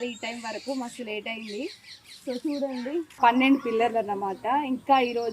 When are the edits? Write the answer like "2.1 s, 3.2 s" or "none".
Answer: 3.1 s